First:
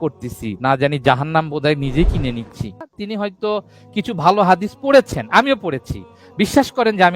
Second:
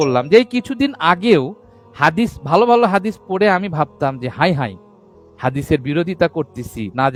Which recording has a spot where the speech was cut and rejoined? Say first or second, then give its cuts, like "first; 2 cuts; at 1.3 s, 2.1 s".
first; 1 cut; at 3.0 s